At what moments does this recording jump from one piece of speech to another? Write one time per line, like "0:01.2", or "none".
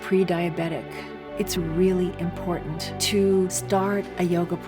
none